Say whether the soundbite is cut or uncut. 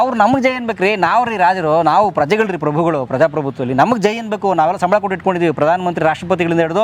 uncut